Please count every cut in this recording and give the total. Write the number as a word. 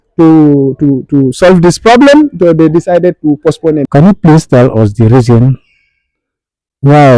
one